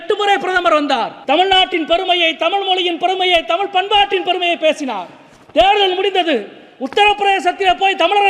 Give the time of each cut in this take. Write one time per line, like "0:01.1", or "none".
0:01.1